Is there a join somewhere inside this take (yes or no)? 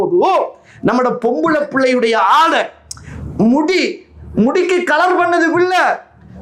no